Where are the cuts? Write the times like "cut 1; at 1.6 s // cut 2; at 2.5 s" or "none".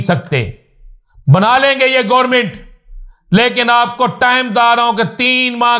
none